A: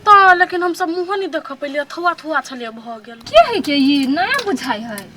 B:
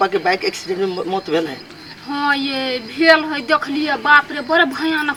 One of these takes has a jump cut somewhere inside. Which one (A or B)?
A